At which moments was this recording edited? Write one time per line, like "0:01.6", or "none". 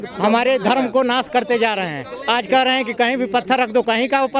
none